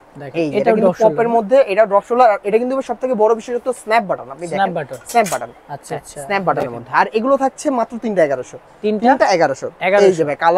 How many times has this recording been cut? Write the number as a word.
zero